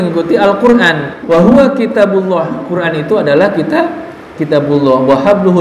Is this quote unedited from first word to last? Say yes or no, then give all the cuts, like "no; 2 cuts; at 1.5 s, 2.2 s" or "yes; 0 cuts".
no; 1 cut; at 1.1 s